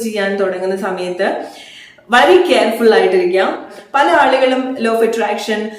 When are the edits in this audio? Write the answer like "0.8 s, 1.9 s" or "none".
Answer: 3.7 s